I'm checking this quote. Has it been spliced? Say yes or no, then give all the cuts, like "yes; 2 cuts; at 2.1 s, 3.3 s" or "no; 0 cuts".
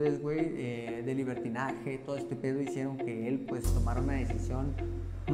no; 0 cuts